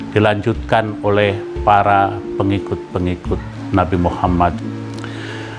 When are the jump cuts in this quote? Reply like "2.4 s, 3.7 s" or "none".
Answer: 3.5 s